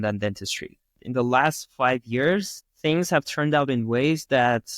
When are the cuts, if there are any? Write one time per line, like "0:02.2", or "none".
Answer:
0:00.9